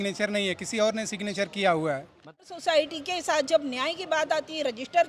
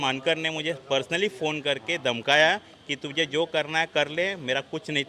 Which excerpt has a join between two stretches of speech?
first; 1 cut; at 2.4 s

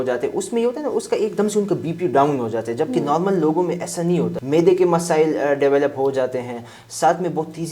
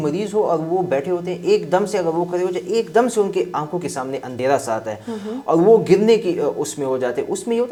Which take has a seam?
first; 1 cut; at 4.3 s

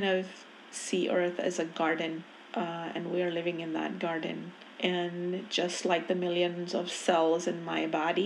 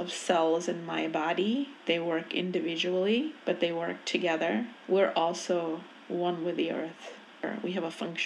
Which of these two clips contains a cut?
second; 1 cut; at 7.3 s

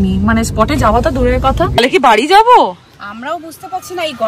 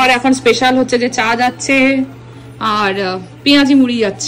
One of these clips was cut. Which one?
first; 1 cut; at 1.8 s

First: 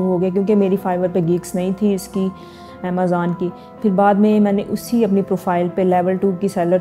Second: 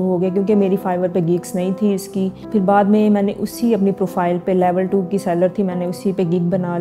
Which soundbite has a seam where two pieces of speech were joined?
second; 1 cut; at 2.4 s

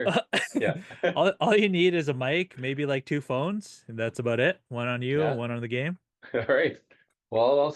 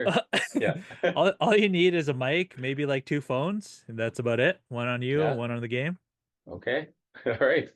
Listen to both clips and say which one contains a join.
first; 1 cut; at 6.1 s

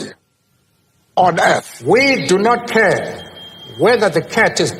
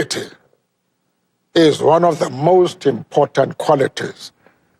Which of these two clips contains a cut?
first; 1 cut; at 1.7 s

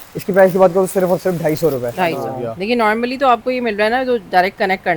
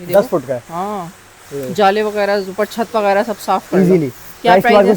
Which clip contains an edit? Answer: first; 1 cut; at 2.3 s

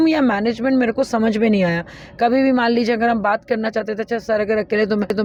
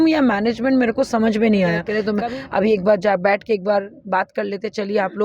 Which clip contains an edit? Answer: second; 1 cut; at 2.0 s

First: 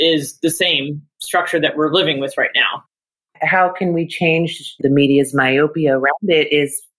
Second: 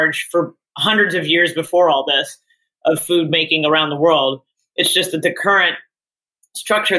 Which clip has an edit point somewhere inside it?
first; 2 cuts; at 3.1 s, 4.8 s

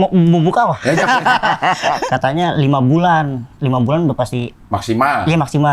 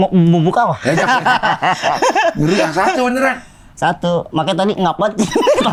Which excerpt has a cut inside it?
first; 1 cut; at 2.0 s

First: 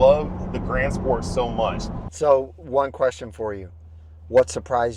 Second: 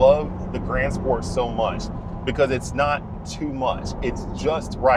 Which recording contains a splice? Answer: first; 1 cut; at 2.0 s

